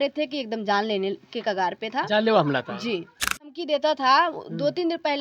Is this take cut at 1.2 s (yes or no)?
no